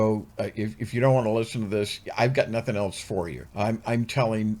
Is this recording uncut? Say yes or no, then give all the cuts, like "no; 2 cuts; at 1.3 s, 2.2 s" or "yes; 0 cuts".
no; 1 cut; at 3.4 s